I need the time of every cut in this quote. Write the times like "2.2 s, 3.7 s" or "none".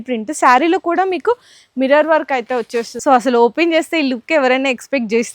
2.9 s

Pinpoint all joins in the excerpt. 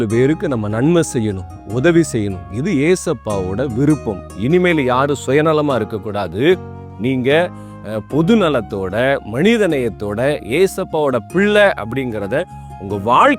4.3 s

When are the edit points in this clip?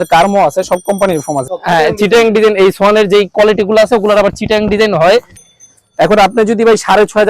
1.5 s, 5.4 s

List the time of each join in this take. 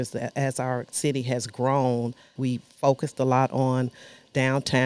2.3 s

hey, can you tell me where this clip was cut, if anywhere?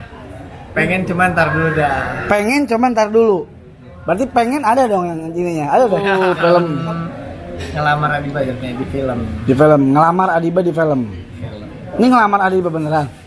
6.1 s

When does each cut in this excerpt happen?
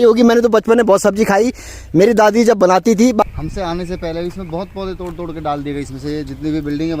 3.2 s

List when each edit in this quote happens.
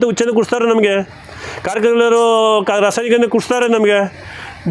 none

